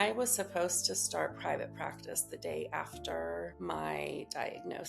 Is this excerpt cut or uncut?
cut